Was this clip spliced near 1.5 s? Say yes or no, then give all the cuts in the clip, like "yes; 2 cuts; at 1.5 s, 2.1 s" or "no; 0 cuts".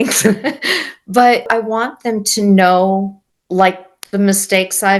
yes; 1 cut; at 1.5 s